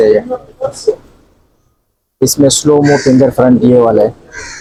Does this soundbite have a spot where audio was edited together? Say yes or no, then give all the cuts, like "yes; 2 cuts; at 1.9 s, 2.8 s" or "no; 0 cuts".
no; 0 cuts